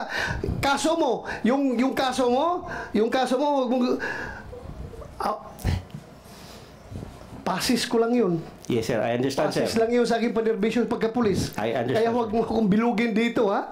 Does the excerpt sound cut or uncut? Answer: uncut